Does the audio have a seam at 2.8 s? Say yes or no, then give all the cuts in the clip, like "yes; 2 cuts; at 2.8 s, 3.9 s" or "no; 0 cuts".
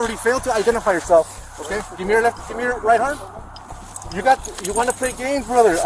yes; 1 cut; at 2.8 s